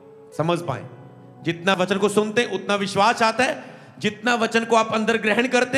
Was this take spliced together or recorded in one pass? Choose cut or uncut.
cut